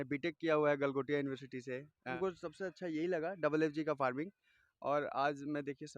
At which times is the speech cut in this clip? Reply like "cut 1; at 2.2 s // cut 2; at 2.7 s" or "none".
cut 1; at 2.1 s